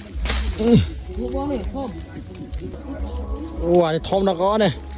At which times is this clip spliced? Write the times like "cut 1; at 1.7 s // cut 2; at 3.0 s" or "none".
cut 1; at 2.8 s